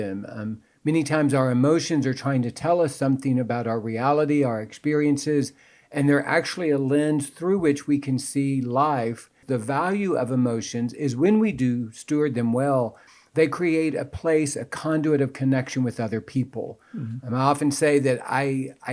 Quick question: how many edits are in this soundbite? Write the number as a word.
one